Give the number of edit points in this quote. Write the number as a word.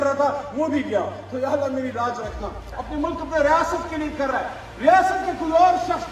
one